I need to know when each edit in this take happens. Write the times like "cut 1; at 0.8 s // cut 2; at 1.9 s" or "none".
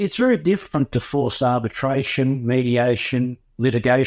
none